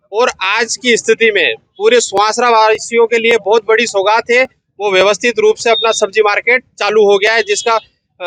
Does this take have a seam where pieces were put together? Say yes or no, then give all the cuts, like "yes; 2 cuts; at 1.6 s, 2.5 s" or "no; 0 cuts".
no; 0 cuts